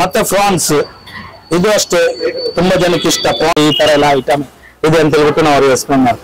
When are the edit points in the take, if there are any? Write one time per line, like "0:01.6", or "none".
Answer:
0:03.5